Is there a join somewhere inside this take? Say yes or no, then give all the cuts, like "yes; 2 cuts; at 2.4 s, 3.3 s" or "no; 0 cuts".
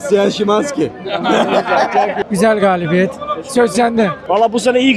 no; 0 cuts